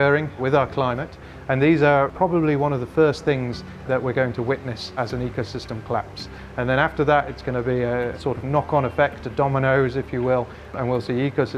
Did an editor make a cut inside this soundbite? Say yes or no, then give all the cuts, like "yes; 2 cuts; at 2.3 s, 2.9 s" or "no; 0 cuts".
no; 0 cuts